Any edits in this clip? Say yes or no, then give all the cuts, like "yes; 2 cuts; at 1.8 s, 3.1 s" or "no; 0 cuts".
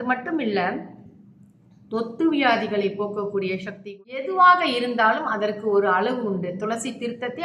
yes; 1 cut; at 4.2 s